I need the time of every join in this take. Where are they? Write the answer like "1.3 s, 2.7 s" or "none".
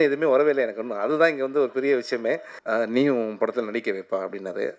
2.5 s